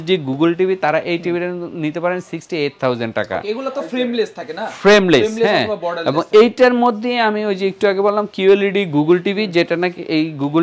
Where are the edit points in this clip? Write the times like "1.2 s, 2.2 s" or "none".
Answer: none